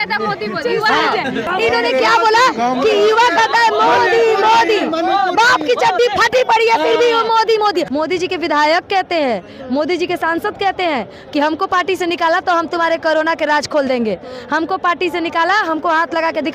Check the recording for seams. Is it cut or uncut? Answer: cut